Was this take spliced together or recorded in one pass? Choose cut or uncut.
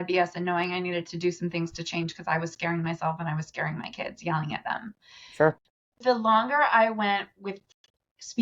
cut